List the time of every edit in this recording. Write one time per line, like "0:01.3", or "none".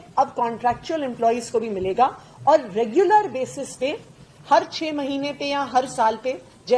none